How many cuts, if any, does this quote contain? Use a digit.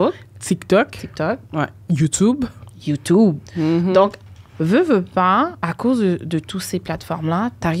2